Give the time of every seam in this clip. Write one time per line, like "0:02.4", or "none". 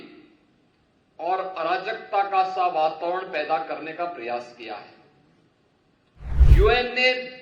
0:06.5